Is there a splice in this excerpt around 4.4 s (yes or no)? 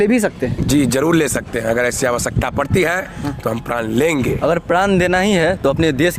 yes